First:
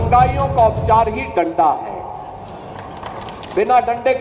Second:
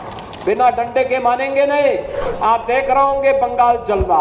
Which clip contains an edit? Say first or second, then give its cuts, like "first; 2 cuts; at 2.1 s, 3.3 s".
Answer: second; 1 cut; at 2.2 s